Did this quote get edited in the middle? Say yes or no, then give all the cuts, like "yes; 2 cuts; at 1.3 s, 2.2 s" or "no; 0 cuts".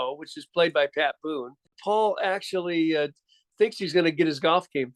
yes; 1 cut; at 1.8 s